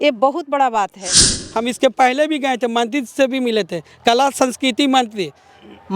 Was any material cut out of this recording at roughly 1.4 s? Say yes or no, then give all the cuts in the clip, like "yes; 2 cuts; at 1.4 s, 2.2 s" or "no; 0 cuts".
yes; 1 cut; at 1.4 s